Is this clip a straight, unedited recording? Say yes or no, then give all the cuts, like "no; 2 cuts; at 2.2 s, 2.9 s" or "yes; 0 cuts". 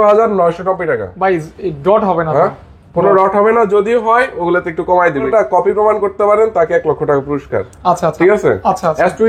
no; 1 cut; at 5.3 s